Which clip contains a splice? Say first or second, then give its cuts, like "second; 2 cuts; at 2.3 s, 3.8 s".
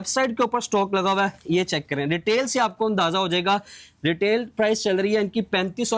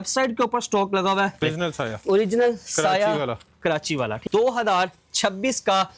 second; 2 cuts; at 1.4 s, 4.2 s